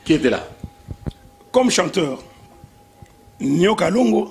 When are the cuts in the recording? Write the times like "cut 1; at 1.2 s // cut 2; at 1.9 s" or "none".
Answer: none